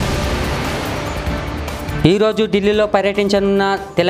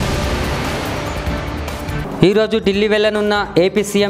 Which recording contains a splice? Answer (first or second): second